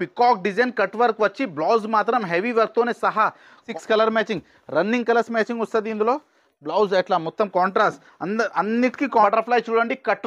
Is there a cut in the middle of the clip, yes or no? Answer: yes